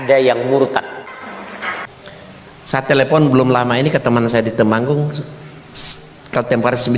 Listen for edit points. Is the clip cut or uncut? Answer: cut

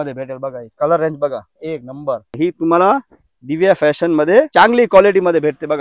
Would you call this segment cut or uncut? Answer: cut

